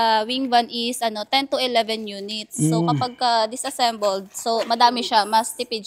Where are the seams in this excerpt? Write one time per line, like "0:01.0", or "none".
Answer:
none